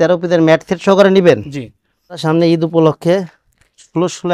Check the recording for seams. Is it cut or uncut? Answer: cut